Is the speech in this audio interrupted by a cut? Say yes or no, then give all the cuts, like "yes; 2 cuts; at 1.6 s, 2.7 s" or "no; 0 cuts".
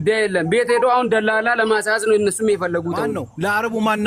yes; 1 cut; at 3.0 s